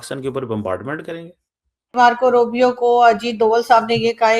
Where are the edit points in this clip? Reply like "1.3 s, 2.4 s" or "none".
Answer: 1.9 s